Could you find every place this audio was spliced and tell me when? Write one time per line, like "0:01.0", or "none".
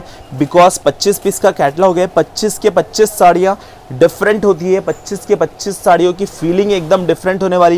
none